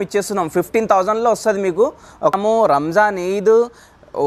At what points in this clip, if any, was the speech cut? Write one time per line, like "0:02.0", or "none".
0:02.4